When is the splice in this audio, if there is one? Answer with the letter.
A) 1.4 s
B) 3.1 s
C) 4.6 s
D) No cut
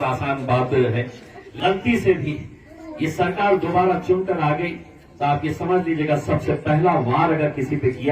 A